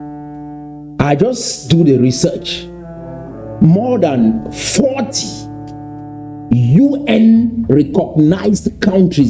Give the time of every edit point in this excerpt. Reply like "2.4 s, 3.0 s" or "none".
none